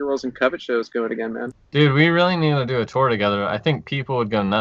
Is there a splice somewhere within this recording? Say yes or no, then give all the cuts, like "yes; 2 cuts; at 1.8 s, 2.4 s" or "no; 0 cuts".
yes; 1 cut; at 1.5 s